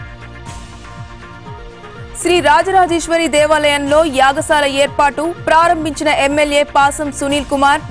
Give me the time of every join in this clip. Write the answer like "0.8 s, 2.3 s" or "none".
1.1 s

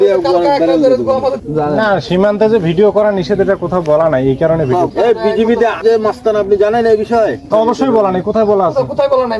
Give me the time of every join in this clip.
none

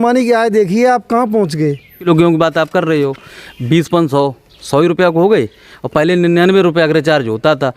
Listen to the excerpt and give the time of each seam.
2.0 s

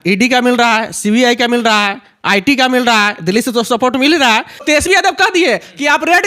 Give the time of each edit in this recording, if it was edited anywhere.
4.6 s

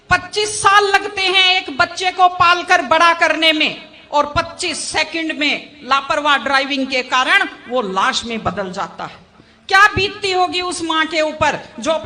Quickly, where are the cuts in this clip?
none

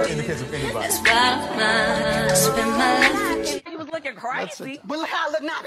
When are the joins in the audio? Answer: 3.7 s

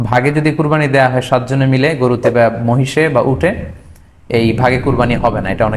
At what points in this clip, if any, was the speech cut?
none

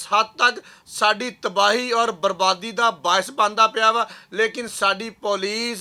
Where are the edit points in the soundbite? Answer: none

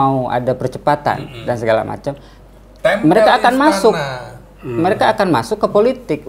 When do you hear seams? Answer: none

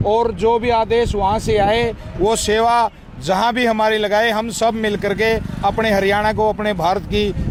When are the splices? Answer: none

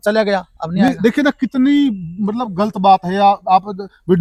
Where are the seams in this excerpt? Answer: none

